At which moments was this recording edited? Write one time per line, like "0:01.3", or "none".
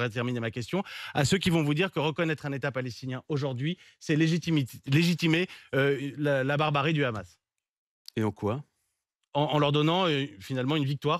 none